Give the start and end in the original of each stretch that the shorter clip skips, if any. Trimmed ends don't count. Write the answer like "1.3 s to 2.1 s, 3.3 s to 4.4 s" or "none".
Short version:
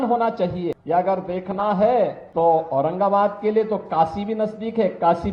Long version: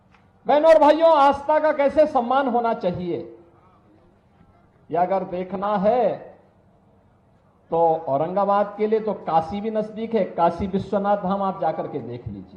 3.2 s to 4.8 s, 6.3 s to 7.6 s

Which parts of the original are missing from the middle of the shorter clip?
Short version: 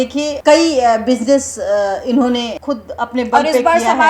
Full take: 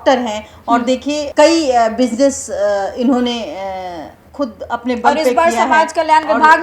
3.5 s to 4.3 s

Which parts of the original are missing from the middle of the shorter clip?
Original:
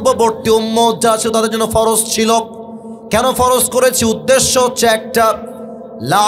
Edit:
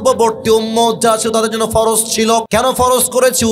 2.5 s to 3.1 s

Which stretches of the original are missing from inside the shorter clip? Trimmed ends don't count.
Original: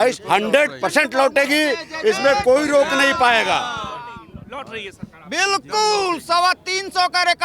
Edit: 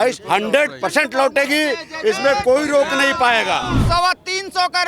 3.8 s to 6.2 s

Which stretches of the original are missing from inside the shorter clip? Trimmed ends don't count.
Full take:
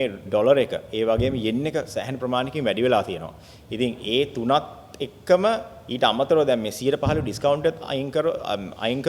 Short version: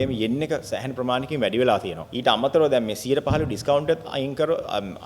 3.3 s to 5.8 s

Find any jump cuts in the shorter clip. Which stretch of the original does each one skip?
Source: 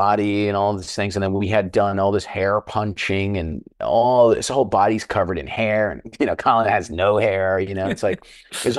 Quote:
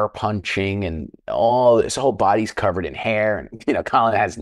none

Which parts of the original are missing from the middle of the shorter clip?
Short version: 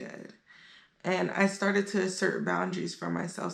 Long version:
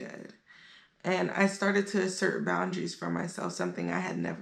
none

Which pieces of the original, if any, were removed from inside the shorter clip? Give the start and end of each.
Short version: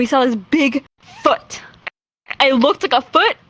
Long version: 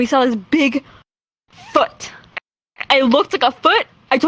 1.0 s to 1.5 s

